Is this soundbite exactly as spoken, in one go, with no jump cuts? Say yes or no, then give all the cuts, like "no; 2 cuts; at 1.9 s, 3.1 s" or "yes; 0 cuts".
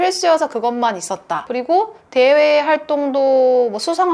no; 1 cut; at 1.4 s